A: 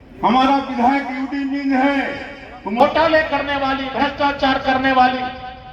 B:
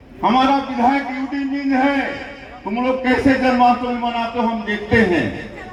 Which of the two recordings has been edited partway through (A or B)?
A